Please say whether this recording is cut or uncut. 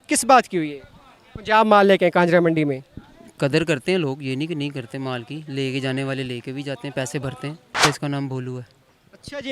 cut